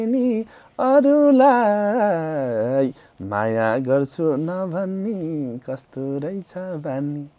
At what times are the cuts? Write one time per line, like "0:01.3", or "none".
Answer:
none